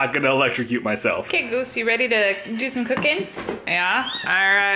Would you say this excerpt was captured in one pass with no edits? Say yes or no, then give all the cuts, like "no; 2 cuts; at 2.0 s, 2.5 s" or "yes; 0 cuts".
yes; 0 cuts